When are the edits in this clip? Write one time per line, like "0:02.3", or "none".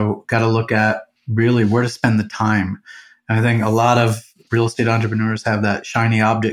0:01.1
0:04.4

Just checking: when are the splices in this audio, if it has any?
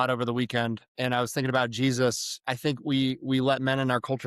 0:00.9
0:02.4

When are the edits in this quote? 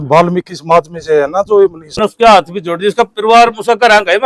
0:02.0

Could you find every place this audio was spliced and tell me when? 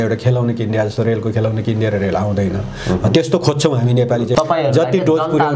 0:04.3

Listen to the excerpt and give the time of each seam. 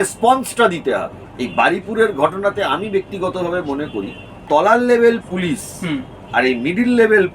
0:01.2
0:04.3

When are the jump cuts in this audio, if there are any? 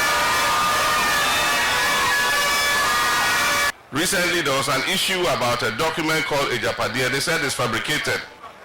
0:03.7

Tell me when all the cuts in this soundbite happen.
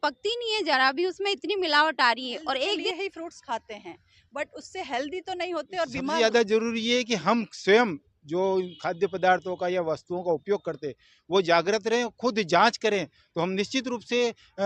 0:02.9
0:06.2

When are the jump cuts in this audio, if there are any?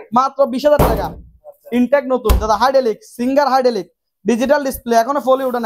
none

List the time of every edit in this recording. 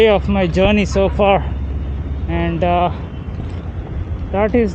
none

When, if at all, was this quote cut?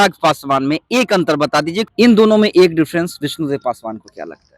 0:01.9

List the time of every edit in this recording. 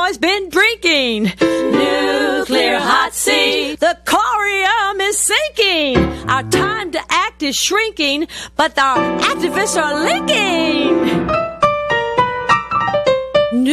none

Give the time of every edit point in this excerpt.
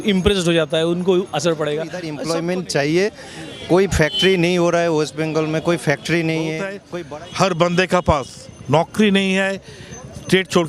0:02.0
0:06.8

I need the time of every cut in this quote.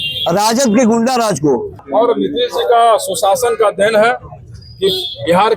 0:01.8

